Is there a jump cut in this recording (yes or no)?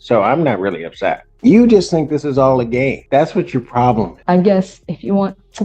yes